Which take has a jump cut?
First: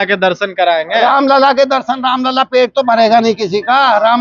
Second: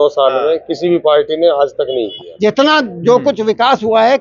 second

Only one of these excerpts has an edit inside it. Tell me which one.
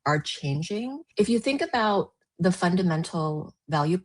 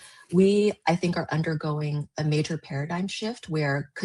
first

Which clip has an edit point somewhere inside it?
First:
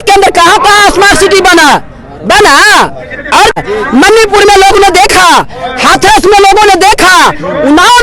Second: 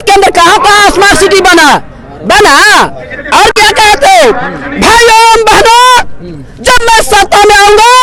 first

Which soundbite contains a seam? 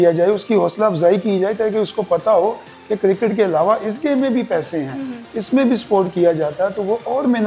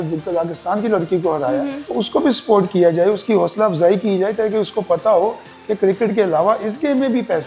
second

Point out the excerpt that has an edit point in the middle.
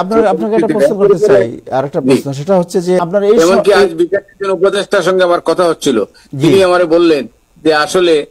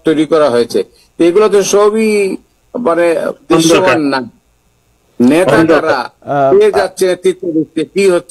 first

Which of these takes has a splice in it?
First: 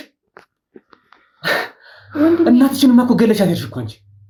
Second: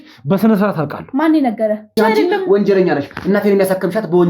second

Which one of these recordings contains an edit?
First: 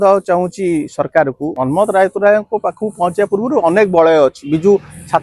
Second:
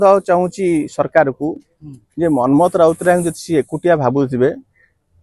first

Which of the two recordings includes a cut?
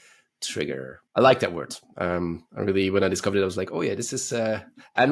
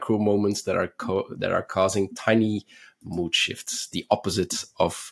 first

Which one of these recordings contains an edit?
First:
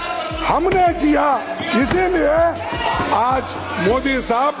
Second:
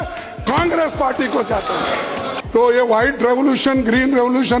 second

